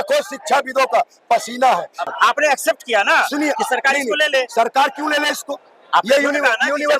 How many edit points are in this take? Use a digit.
1